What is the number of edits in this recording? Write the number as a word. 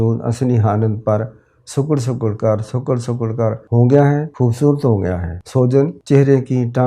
four